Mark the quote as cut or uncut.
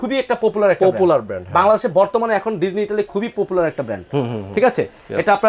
uncut